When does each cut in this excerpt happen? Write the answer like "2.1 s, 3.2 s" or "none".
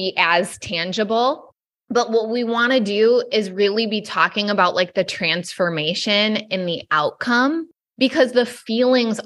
7.8 s

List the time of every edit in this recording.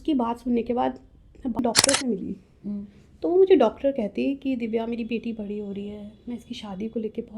1.6 s

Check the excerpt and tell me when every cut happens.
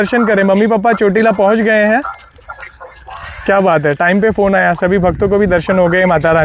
none

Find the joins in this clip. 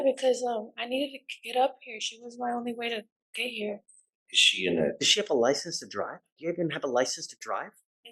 none

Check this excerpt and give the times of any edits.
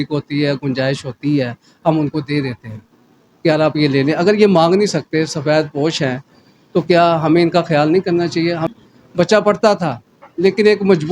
8.6 s

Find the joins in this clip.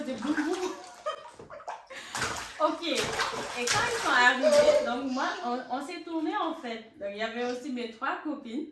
none

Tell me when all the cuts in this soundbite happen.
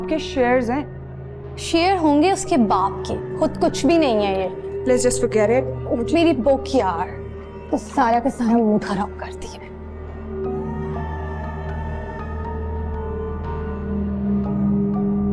none

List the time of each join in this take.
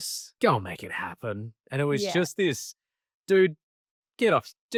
none

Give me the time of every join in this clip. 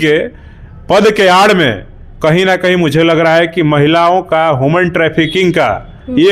none

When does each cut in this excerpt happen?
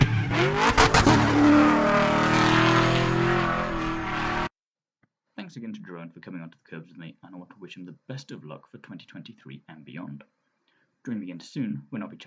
4.5 s

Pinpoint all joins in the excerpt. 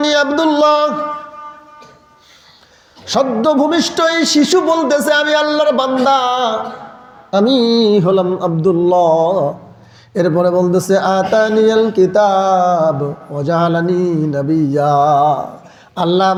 none

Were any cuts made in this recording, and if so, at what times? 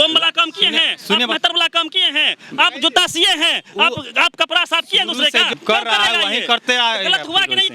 5.5 s

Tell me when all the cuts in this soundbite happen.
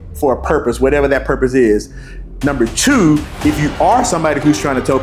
none

